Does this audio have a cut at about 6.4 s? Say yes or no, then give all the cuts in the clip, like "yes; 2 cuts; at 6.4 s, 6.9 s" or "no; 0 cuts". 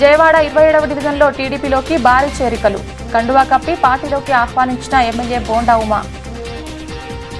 yes; 1 cut; at 6.4 s